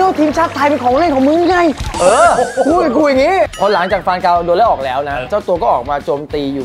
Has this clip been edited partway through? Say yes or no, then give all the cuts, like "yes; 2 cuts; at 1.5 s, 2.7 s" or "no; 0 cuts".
yes; 2 cuts; at 3.5 s, 5.3 s